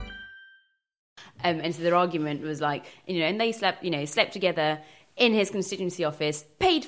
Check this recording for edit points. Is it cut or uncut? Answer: cut